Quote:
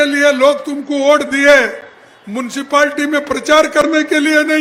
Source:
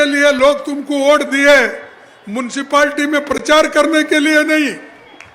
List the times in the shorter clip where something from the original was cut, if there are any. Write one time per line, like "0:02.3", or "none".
none